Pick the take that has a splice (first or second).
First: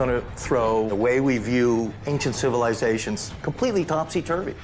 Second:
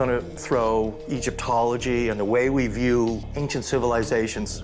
first